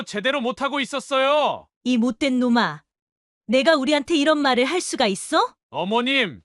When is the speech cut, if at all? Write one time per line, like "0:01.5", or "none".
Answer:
0:01.7